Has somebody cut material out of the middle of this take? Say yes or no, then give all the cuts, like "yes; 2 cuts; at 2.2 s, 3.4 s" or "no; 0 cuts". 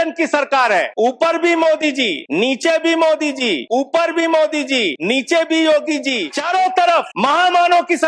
yes; 6 cuts; at 0.9 s, 2.2 s, 3.6 s, 5.0 s, 6.3 s, 7.1 s